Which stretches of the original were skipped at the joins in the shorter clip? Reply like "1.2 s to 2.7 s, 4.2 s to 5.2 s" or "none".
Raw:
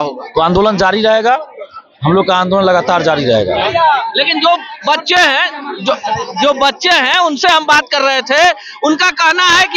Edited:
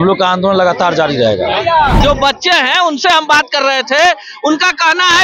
4.1 s to 6.4 s

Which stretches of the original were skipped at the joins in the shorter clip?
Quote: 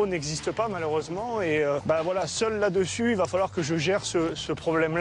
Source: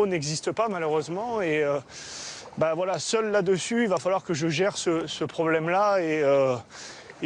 1.8 s to 2.5 s

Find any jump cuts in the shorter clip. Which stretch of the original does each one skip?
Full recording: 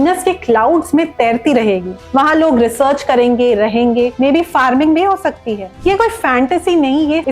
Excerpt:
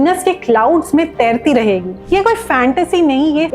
1.9 s to 5.7 s

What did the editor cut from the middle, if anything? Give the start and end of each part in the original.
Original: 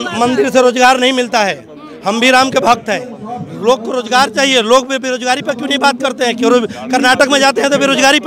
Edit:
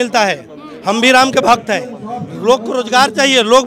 none

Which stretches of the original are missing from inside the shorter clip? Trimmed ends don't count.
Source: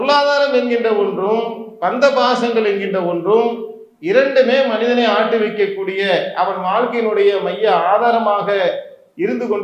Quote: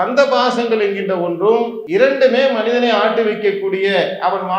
3.6 s to 3.9 s

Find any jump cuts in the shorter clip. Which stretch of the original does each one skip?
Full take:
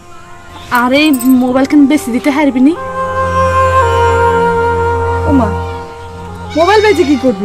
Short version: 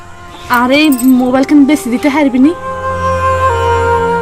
2.9 s to 3.0 s

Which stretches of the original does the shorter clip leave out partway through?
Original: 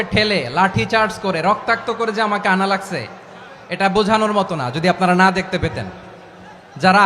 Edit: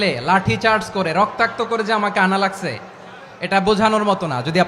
none

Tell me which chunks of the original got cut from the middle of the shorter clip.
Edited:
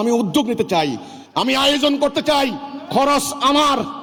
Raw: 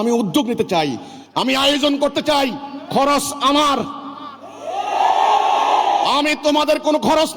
none

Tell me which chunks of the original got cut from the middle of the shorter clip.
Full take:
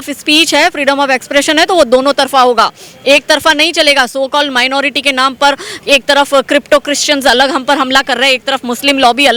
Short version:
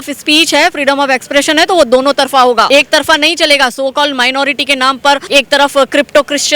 2.7 s to 3.0 s, 5.6 s to 5.8 s

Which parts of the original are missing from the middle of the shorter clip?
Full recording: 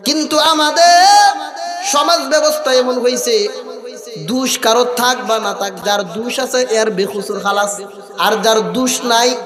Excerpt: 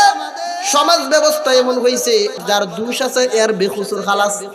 3.6 s to 5.8 s

